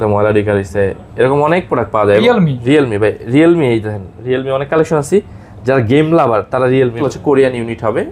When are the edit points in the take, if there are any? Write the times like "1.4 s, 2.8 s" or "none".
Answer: 2.2 s, 7.1 s